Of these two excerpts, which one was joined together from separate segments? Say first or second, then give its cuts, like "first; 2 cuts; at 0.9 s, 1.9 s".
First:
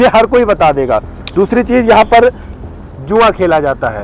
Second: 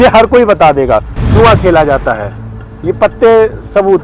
second; 1 cut; at 1.2 s